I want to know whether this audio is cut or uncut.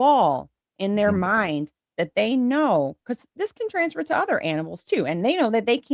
uncut